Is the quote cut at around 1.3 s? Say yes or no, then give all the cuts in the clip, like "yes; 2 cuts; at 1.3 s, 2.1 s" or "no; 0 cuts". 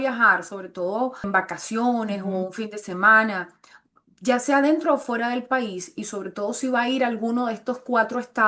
yes; 1 cut; at 1.3 s